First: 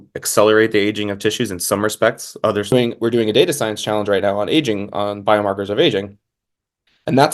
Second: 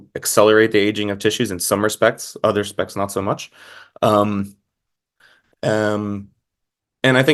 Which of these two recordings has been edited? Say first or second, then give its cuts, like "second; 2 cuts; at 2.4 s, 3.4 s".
first; 1 cut; at 2.7 s